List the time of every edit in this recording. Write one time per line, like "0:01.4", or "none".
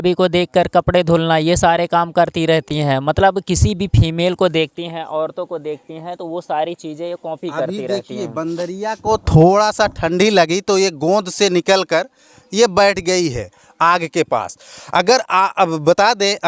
none